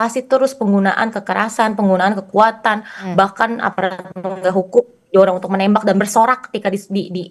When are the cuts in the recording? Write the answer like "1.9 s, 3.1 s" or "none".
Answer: none